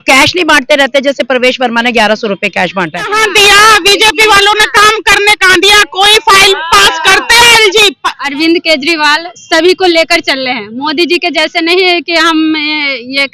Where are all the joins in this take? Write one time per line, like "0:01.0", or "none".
0:03.1
0:08.1